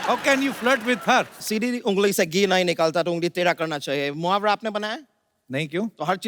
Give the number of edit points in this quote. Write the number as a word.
one